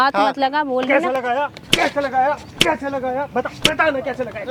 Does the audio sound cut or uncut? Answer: uncut